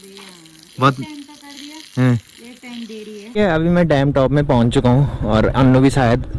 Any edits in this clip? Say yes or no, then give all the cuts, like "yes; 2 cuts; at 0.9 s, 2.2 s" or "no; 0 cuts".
yes; 1 cut; at 3.4 s